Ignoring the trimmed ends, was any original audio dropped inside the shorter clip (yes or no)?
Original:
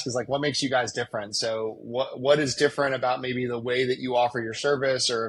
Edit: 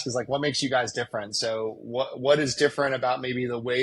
no